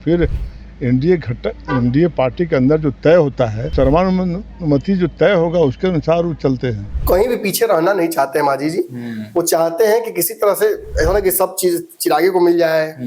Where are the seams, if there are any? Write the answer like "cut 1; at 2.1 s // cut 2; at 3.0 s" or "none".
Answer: cut 1; at 3.6 s // cut 2; at 6.9 s